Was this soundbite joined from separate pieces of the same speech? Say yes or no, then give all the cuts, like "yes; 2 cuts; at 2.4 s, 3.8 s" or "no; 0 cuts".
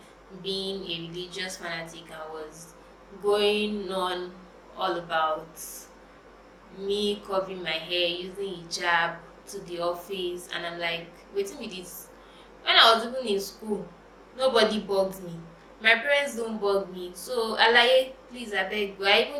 no; 0 cuts